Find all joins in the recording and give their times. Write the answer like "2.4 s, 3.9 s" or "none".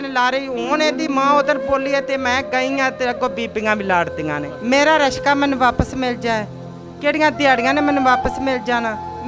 4.5 s